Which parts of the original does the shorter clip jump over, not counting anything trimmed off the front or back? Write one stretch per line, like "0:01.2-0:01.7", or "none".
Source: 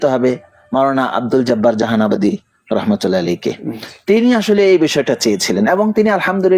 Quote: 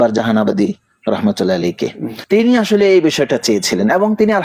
0:03.7-0:03.9